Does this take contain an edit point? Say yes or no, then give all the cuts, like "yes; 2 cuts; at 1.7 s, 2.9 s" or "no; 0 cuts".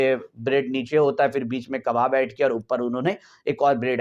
no; 0 cuts